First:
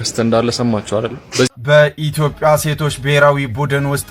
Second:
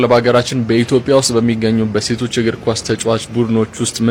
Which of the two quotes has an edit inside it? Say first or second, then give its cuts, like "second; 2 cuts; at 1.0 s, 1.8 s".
first; 1 cut; at 1.5 s